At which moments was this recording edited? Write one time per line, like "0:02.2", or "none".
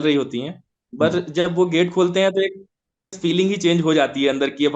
0:03.1